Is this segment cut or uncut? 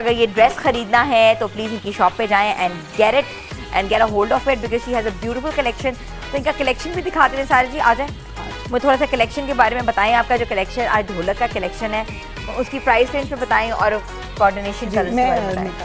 uncut